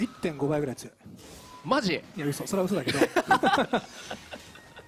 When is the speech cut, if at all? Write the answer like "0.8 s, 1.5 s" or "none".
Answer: 1.0 s